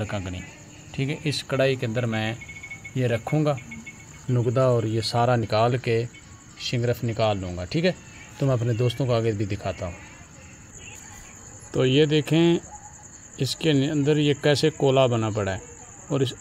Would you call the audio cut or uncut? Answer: uncut